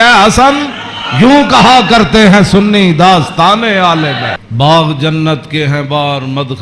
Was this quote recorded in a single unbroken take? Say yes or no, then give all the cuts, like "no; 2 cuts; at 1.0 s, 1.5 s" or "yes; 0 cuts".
no; 1 cut; at 4.5 s